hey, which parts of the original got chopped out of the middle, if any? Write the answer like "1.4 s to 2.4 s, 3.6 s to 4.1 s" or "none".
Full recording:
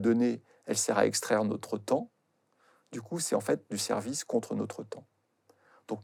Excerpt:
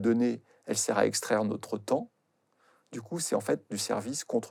none